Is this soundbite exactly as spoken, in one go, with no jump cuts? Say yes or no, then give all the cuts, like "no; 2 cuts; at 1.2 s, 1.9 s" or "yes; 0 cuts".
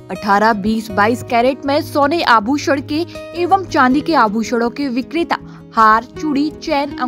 yes; 0 cuts